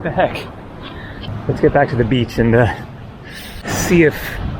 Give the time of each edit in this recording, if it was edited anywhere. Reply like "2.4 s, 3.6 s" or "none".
1.2 s, 3.6 s